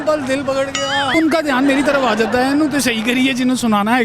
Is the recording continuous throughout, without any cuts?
no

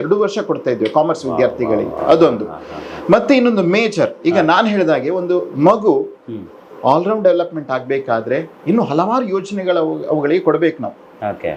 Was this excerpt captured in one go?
yes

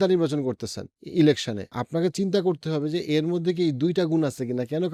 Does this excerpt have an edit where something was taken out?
no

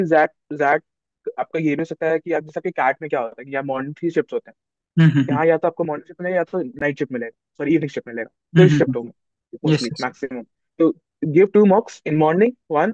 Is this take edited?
no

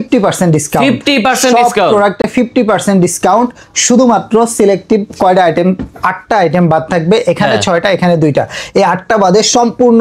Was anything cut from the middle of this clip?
no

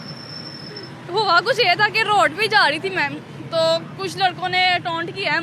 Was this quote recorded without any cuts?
yes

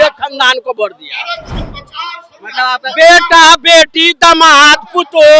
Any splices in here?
no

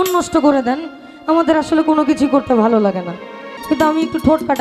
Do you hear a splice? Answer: yes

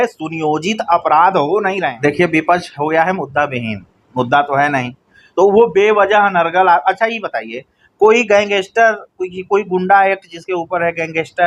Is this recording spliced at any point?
yes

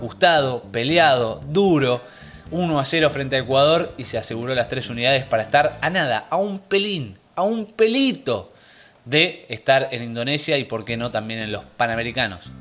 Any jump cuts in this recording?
no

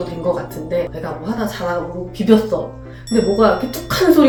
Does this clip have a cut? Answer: no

